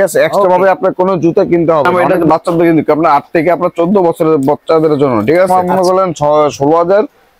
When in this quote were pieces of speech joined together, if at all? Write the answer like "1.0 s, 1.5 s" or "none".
1.9 s, 5.5 s